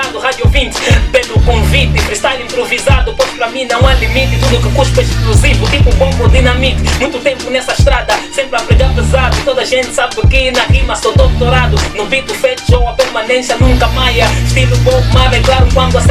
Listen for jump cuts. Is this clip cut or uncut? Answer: uncut